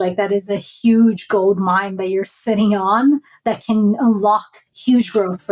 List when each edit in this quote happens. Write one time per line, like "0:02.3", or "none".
none